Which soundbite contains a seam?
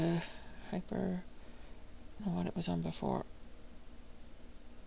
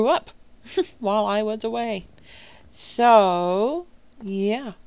first; 1 cut; at 2.2 s

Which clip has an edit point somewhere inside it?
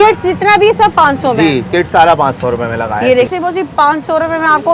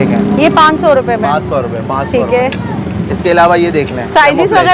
first; 1 cut; at 3.3 s

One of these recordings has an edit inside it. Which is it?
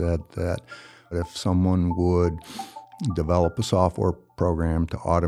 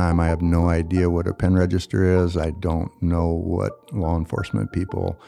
first; 1 cut; at 1.1 s

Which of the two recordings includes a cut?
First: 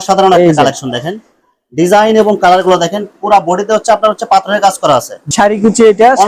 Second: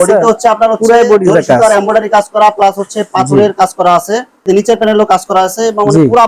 first; 1 cut; at 5.2 s

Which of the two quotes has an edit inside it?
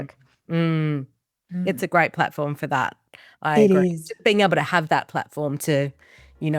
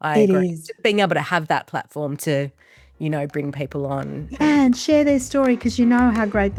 first; 1 cut; at 1.6 s

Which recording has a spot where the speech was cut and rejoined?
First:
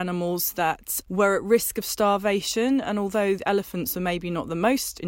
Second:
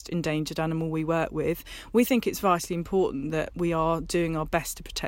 first; 1 cut; at 0.9 s

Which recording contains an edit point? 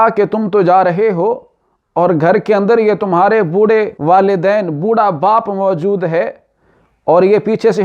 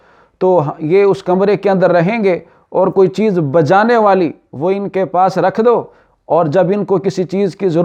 first; 1 cut; at 3.9 s

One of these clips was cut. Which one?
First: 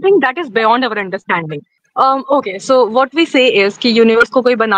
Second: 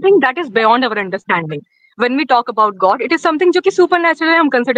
first; 1 cut; at 1.8 s

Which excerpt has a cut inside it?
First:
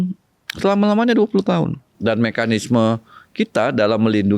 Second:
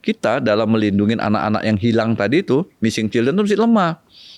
first; 1 cut; at 1.9 s

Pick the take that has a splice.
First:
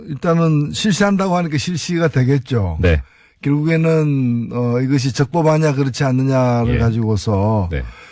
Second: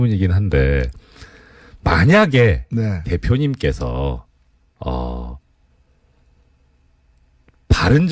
second; 1 cut; at 2.4 s

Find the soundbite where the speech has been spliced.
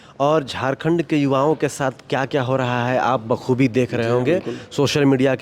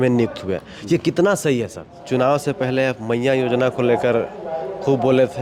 second; 1 cut; at 1.9 s

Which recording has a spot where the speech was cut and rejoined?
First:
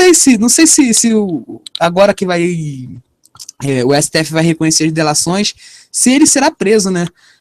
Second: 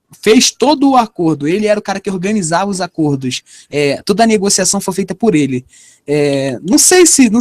second; 1 cut; at 1.8 s

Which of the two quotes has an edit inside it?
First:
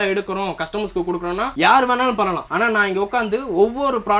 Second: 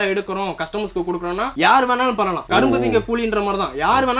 first; 1 cut; at 2.4 s

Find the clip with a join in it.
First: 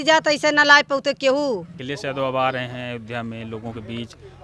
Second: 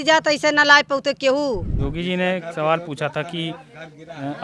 second; 1 cut; at 1.7 s

